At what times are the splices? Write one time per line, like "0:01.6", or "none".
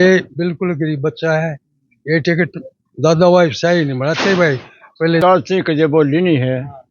0:05.2